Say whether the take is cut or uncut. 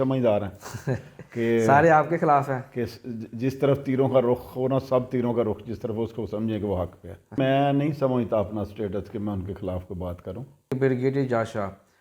cut